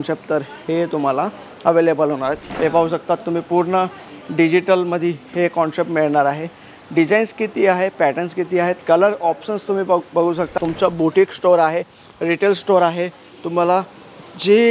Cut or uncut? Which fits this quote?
cut